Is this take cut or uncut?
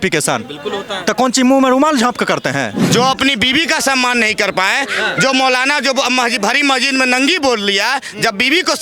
cut